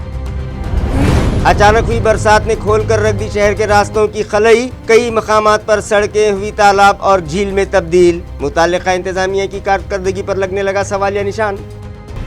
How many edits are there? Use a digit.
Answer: 0